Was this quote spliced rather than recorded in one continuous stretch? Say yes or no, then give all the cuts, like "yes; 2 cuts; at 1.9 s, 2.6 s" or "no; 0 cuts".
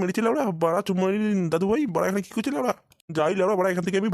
no; 0 cuts